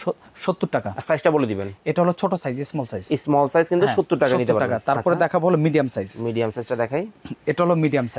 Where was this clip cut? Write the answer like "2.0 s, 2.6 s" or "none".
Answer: none